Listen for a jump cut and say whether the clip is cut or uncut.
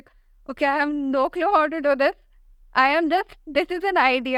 uncut